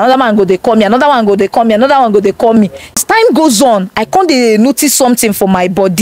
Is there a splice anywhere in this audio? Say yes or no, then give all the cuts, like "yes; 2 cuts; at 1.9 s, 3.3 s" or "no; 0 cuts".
yes; 1 cut; at 3.0 s